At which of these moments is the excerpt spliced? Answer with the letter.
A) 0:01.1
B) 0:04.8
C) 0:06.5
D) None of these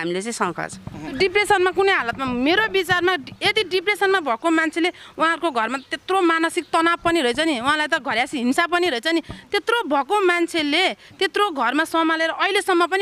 A